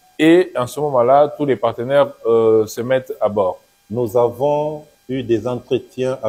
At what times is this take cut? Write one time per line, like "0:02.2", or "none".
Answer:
0:03.7
0:04.9